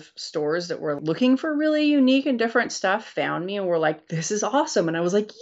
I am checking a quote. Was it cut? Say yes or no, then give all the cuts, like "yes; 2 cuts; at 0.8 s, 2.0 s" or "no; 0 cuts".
yes; 1 cut; at 1.0 s